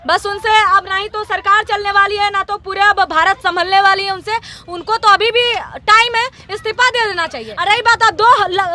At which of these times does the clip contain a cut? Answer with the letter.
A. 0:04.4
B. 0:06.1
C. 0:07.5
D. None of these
C